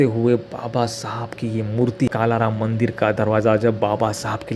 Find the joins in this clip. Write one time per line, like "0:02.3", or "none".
0:02.1

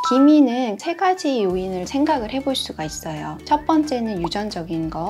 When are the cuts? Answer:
0:00.8
0:01.9

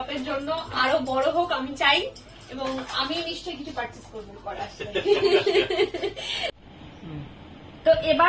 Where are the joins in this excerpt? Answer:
0:06.5

